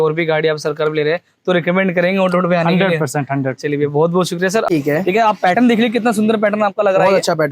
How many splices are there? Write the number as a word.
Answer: one